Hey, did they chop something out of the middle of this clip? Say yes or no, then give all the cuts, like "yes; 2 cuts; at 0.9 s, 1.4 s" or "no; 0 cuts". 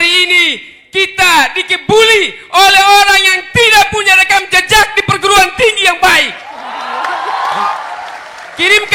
yes; 1 cut; at 7.7 s